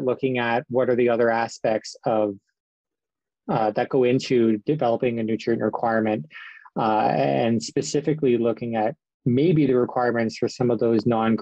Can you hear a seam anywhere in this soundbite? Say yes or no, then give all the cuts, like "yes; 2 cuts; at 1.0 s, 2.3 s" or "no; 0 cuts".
no; 0 cuts